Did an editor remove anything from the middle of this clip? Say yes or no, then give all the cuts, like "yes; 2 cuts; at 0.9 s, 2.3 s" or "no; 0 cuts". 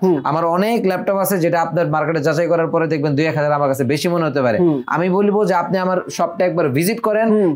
no; 0 cuts